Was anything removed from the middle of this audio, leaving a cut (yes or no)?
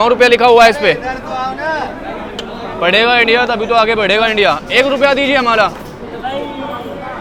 no